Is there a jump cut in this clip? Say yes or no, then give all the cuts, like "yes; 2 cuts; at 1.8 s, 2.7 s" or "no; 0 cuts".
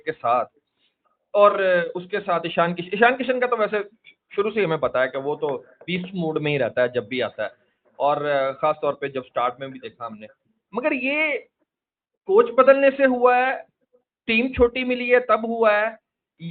no; 0 cuts